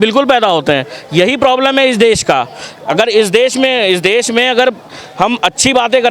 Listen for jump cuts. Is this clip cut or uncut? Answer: uncut